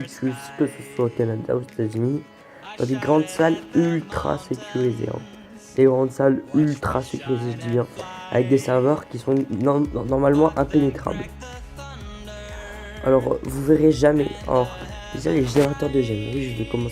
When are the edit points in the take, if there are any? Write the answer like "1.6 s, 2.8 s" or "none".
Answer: 13.5 s